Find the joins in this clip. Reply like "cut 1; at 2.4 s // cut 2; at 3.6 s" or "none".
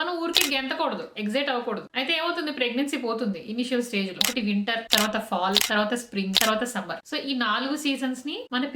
cut 1; at 4.2 s